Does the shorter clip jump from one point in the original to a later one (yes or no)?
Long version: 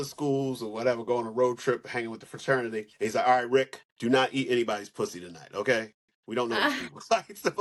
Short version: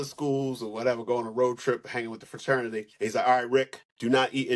no